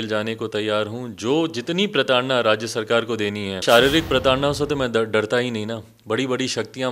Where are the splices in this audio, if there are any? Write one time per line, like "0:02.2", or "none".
0:03.6